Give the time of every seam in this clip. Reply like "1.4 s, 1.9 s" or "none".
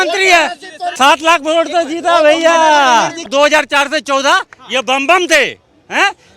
1.0 s, 3.3 s